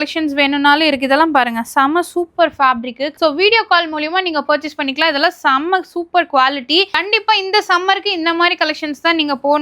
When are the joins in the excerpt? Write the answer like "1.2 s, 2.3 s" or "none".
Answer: 3.1 s